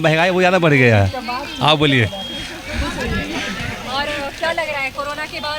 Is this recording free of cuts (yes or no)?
yes